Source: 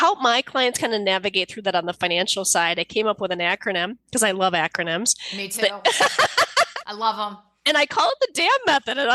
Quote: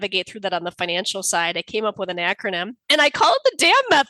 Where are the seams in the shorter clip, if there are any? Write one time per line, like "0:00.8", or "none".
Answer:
0:02.7